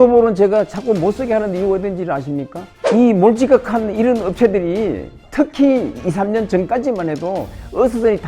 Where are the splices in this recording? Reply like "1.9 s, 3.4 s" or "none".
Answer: 2.5 s, 5.2 s